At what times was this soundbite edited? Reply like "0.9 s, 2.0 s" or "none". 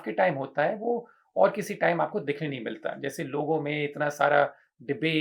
none